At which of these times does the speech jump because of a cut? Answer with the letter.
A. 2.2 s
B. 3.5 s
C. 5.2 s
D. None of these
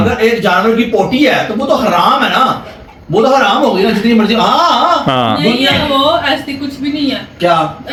D